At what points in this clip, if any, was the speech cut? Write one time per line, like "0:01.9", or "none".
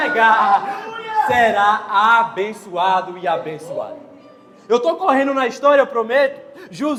none